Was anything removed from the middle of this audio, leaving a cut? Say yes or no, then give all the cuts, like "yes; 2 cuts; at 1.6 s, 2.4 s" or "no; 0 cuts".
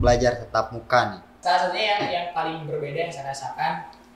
yes; 1 cut; at 1.4 s